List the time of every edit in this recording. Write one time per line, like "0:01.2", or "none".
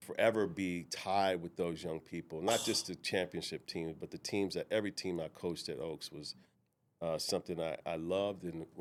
none